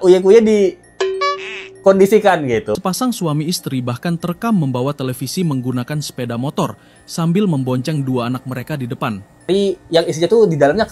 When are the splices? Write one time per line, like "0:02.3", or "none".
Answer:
0:02.7
0:09.5